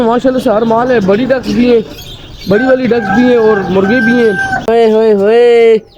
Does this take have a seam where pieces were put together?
yes; 1 cut; at 4.7 s

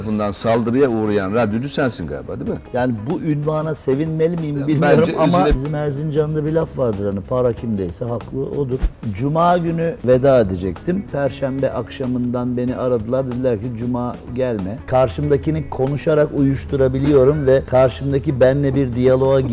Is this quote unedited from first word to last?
no; 5 cuts; at 5.5 s, 8.8 s, 10.0 s, 14.9 s, 17.7 s

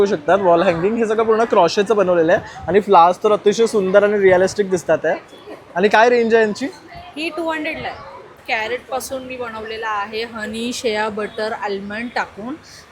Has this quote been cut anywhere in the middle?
yes; 1 cut; at 8.4 s

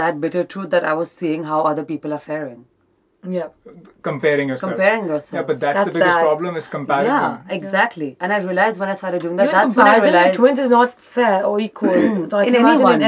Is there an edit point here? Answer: no; 0 cuts

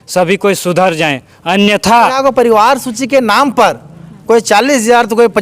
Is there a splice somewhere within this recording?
yes; 1 cut; at 2.1 s

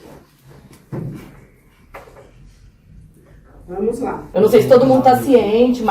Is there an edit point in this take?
yes; 1 cut; at 4.2 s

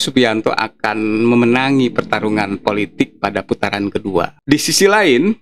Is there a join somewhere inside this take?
yes; 1 cut; at 4.3 s

